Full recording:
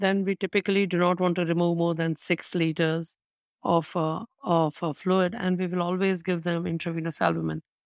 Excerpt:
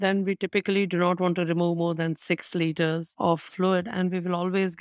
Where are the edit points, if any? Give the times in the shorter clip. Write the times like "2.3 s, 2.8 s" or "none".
3.5 s